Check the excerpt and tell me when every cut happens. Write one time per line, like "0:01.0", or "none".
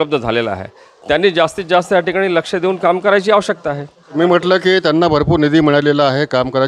0:04.0